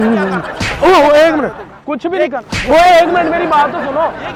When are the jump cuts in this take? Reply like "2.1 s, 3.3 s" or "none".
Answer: none